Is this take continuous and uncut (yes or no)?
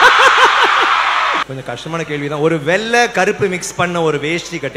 no